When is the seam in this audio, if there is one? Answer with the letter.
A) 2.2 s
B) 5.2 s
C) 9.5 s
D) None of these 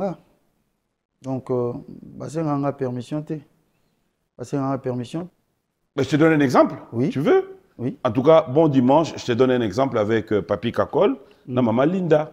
B